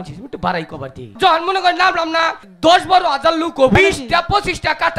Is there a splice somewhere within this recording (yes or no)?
yes